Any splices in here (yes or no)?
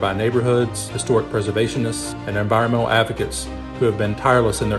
no